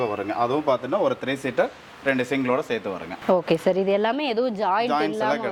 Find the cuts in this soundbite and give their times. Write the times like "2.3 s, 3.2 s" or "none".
none